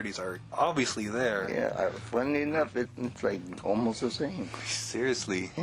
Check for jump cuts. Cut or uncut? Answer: cut